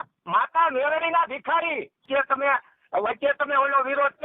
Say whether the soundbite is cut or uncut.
cut